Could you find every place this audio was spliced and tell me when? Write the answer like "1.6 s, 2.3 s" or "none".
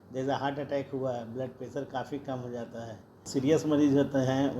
3.3 s